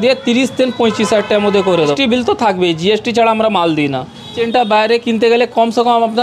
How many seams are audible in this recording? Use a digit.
0